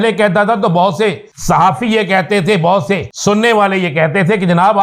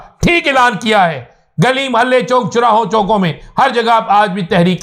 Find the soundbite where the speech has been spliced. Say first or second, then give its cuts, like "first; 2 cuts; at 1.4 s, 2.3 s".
first; 2 cuts; at 1.3 s, 3.1 s